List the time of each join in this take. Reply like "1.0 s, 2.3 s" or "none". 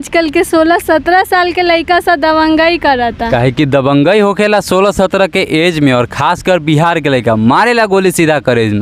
none